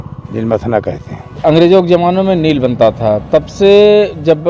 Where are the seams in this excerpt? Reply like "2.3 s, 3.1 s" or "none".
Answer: 1.3 s

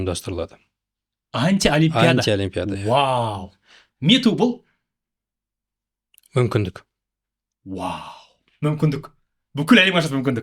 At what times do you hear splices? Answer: 3.8 s

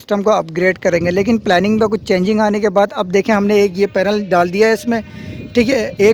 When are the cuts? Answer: none

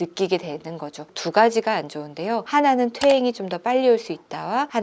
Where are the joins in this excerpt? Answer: 1.0 s

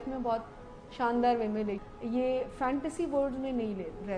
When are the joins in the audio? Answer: 1.9 s

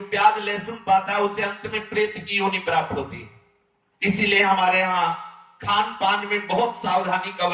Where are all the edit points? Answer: none

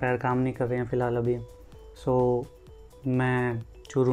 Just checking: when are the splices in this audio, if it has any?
none

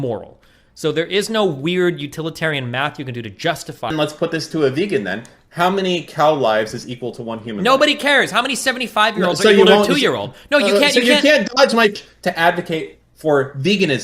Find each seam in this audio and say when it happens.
3.9 s, 11.9 s

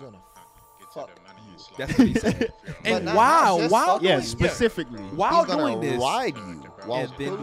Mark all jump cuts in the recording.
none

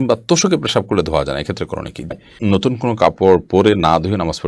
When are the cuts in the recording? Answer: 2.2 s

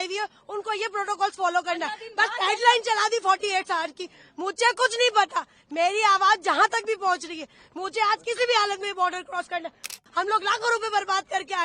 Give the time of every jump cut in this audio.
9.9 s

